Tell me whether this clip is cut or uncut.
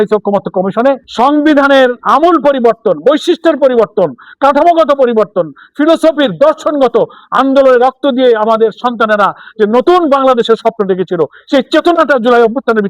cut